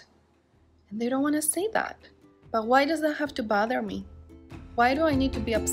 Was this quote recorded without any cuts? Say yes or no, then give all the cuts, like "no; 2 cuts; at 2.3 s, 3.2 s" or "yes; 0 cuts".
no; 1 cut; at 4.7 s